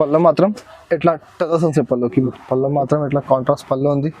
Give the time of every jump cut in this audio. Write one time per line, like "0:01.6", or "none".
0:02.3